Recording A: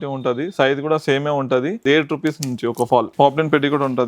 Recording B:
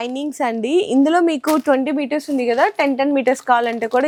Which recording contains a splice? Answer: A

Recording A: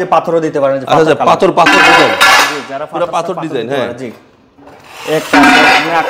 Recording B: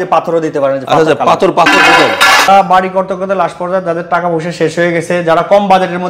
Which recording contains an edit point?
B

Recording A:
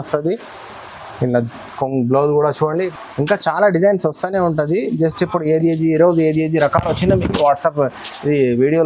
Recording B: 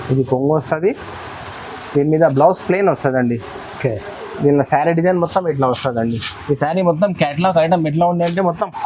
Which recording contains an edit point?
A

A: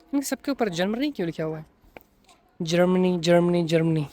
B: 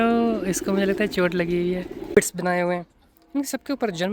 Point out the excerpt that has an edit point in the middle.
B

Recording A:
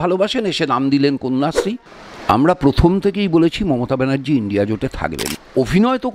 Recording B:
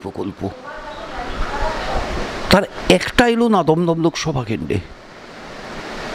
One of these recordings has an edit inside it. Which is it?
A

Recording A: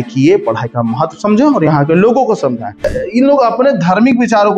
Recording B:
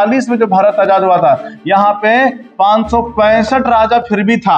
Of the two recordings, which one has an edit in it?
A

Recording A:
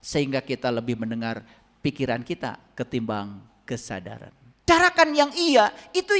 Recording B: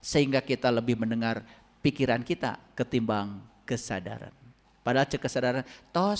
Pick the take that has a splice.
A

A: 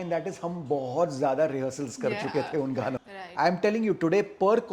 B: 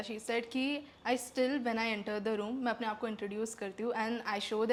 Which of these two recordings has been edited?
A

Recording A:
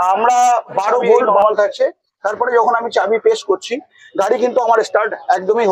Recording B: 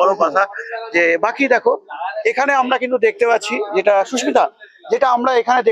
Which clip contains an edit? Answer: A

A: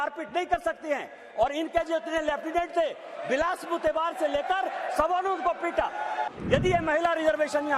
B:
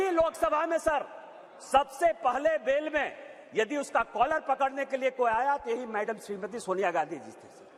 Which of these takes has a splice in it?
A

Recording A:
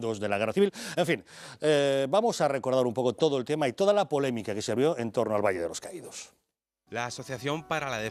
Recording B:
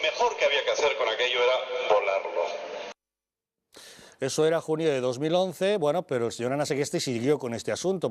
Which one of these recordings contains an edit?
B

